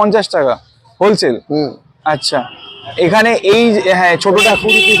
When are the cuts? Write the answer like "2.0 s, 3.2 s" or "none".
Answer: none